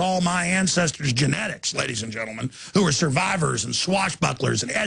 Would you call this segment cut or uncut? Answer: cut